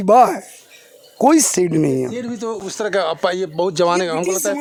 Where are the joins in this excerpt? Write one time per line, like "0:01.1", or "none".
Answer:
none